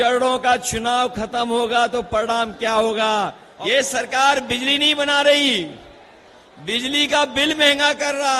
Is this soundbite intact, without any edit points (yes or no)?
no